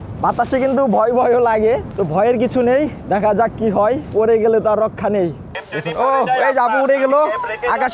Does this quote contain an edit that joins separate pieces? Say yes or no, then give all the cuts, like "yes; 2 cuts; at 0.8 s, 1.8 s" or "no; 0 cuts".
yes; 4 cuts; at 1.9 s, 3.0 s, 4.0 s, 5.5 s